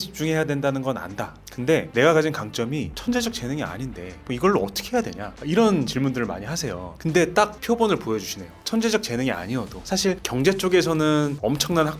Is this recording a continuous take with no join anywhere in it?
yes; 0 cuts

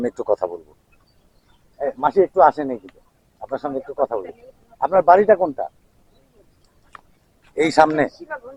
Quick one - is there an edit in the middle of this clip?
no; 0 cuts

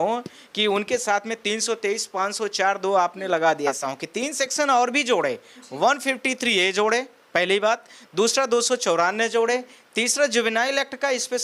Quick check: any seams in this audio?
yes; 1 cut; at 3.8 s

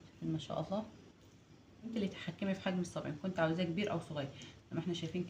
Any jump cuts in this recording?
yes; 1 cut; at 1.9 s

